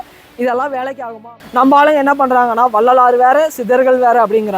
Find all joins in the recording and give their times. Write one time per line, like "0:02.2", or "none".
0:01.3

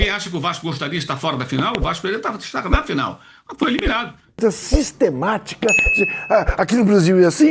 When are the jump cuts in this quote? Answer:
0:04.4

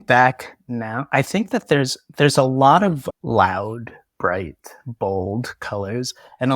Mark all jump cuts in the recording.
0:01.0
0:03.1

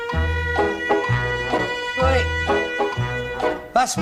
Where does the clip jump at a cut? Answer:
0:03.0

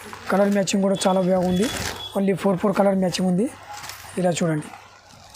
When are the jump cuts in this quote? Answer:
none

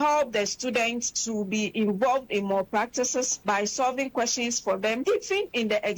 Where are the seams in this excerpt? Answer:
0:01.1
0:03.3
0:05.0

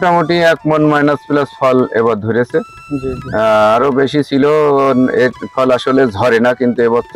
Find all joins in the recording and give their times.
none

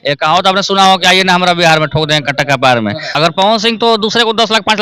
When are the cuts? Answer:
0:03.0

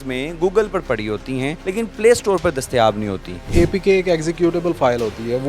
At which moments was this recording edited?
0:01.6
0:03.5

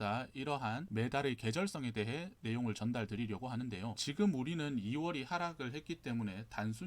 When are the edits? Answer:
0:03.9

